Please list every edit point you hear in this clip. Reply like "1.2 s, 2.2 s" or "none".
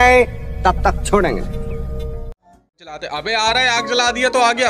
2.7 s